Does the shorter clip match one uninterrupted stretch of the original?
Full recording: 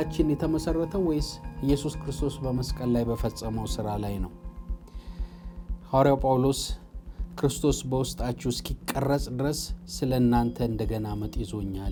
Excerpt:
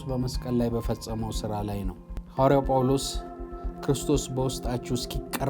no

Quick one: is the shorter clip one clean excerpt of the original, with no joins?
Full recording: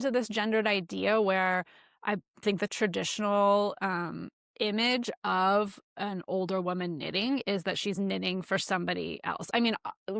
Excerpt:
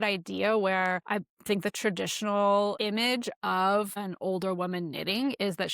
no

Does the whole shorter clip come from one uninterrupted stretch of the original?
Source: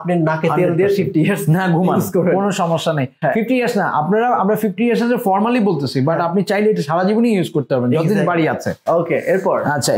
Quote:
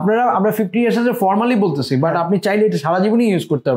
yes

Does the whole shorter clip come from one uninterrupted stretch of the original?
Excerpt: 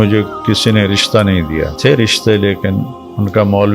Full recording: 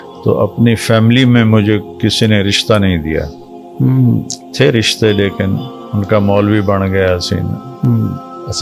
no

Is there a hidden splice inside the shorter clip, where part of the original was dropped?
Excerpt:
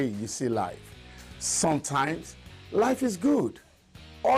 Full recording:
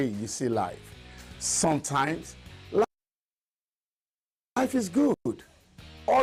yes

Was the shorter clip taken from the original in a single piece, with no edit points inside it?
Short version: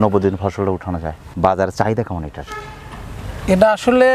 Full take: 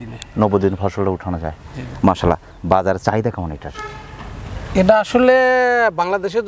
no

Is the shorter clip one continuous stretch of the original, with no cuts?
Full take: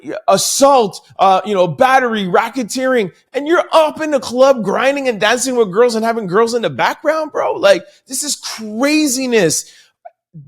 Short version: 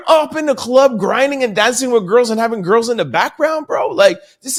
yes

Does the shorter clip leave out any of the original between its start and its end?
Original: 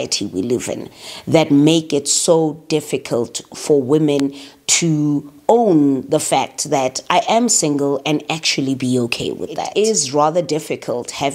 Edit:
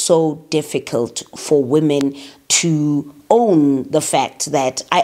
no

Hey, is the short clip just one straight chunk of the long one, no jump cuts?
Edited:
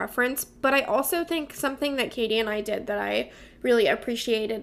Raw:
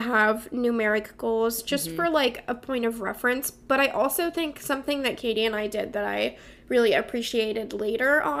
yes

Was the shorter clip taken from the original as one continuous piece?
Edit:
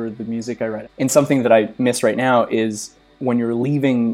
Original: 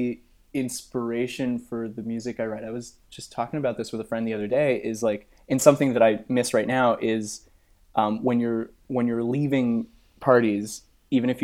no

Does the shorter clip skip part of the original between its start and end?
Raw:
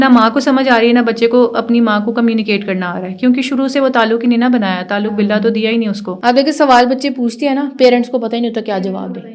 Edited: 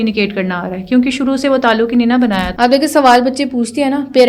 yes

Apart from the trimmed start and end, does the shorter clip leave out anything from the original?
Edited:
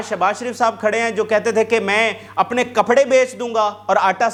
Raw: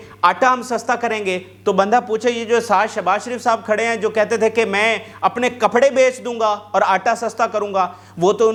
no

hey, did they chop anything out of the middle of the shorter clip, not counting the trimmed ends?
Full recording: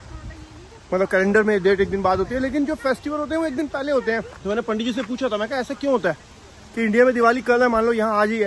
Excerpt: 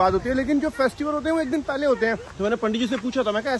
no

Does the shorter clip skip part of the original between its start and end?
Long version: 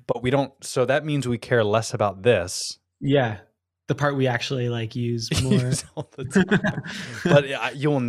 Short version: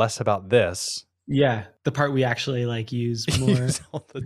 yes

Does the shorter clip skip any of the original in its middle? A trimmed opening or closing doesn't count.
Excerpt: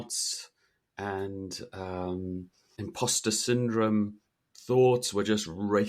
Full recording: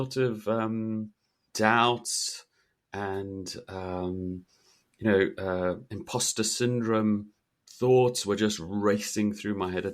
yes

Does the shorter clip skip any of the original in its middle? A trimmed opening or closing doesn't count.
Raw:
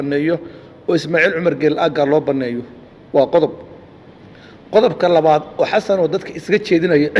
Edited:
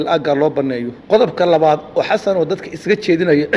yes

